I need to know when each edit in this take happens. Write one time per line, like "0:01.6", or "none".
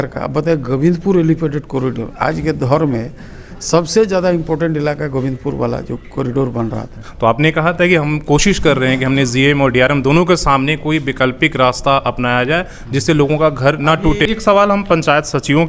0:07.0
0:14.2